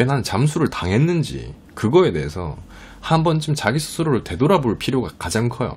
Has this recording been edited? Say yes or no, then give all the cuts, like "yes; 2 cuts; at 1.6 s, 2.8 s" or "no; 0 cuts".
no; 0 cuts